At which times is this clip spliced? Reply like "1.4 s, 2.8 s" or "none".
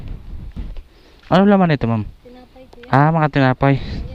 none